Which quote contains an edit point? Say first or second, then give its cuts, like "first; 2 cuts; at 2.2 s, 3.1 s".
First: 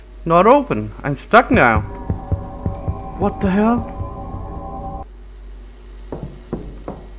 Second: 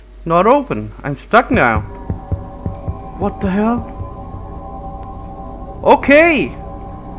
first; 1 cut; at 5.0 s